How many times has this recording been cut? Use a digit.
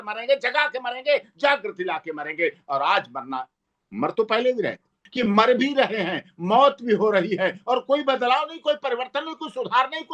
1